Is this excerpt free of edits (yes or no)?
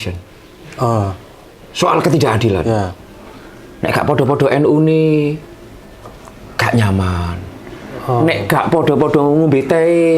no